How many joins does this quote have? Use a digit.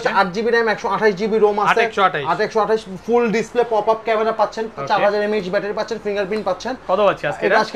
0